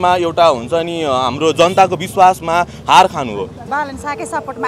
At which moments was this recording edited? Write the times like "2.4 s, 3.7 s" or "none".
3.6 s